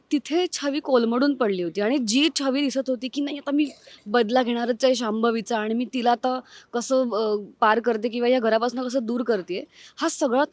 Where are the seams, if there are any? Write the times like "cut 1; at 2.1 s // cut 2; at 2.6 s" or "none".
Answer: none